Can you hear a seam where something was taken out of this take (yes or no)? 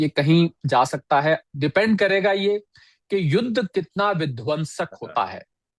no